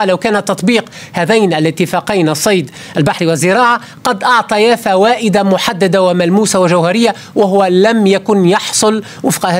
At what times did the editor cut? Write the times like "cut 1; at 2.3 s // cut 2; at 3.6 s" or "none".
none